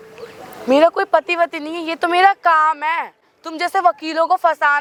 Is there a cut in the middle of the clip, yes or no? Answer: no